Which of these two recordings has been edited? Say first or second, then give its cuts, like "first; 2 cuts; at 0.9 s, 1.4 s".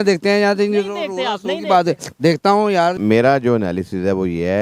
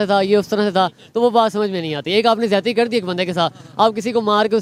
first; 1 cut; at 3.0 s